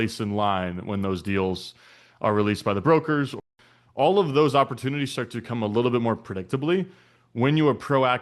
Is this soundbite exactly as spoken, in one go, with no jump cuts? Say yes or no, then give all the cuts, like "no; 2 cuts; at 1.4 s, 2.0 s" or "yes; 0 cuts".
no; 1 cut; at 3.4 s